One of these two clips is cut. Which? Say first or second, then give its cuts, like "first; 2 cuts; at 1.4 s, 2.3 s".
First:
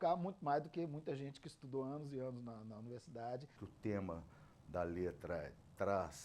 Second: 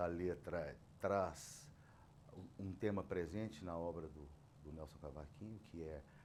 first; 1 cut; at 3.6 s